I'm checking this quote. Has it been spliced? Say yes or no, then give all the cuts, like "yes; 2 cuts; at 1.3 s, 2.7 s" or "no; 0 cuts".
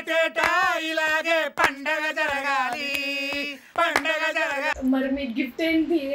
yes; 1 cut; at 4.6 s